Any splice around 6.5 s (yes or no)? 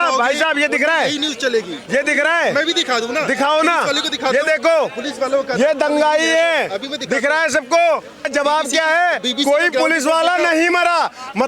no